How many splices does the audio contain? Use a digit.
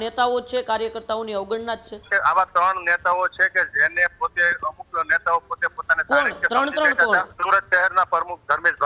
2